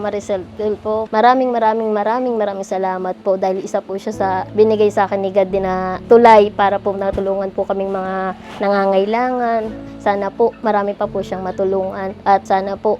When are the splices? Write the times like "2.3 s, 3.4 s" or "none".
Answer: 1.1 s